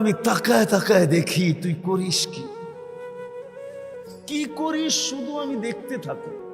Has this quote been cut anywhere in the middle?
yes; 2 cuts; at 2.1 s, 3.8 s

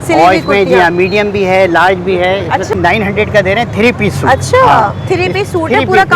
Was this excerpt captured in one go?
no; 1 cut; at 2.7 s

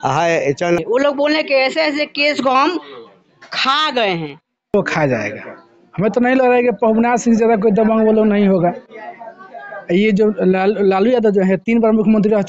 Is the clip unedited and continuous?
no; 2 cuts; at 0.8 s, 4.7 s

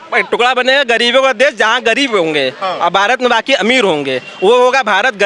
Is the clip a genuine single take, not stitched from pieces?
yes; 0 cuts

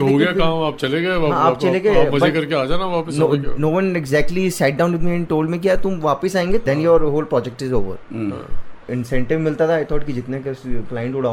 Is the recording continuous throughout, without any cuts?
yes; 0 cuts

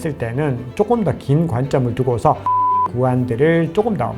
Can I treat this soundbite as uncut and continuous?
no; 1 cut; at 2.8 s

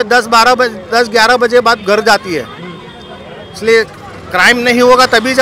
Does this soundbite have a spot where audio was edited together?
no; 0 cuts

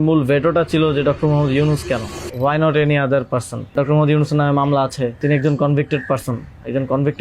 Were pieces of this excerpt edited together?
yes; 3 cuts; at 2.2 s, 3.7 s, 5.2 s

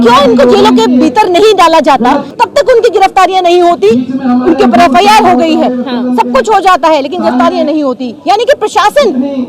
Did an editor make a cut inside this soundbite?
yes; 1 cut; at 2.3 s

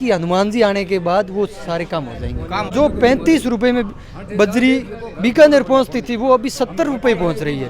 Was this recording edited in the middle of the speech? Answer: yes; 1 cut; at 2.7 s

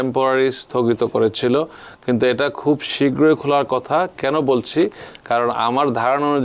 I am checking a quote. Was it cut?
no; 0 cuts

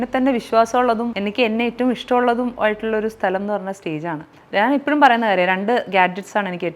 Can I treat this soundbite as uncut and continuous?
no; 2 cuts; at 1.1 s, 4.3 s

